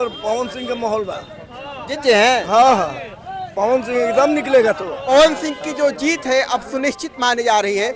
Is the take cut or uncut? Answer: cut